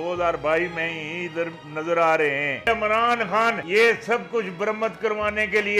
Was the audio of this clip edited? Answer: yes; 2 cuts; at 2.7 s, 3.6 s

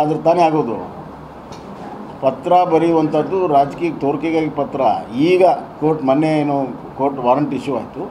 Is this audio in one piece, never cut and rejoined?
yes; 0 cuts

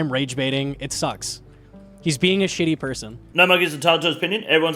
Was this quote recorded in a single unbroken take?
no; 1 cut; at 3.2 s

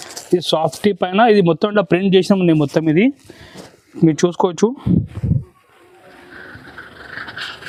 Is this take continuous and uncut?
yes; 0 cuts

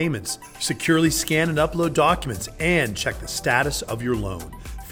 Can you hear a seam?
no; 0 cuts

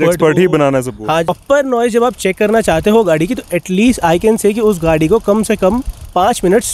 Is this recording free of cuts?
no; 1 cut; at 1.4 s

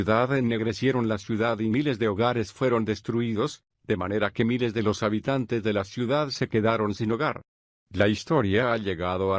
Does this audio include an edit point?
yes; 1 cut; at 2.8 s

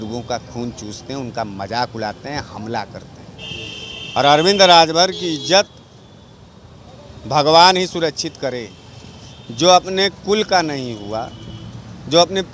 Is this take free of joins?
yes; 0 cuts

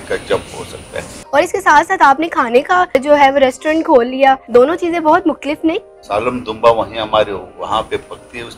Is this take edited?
yes; 4 cuts; at 1.2 s, 3.0 s, 4.4 s, 5.9 s

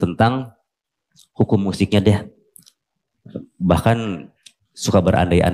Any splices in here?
no; 0 cuts

